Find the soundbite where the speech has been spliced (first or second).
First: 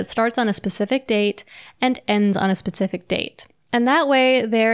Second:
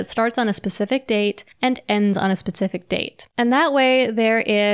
second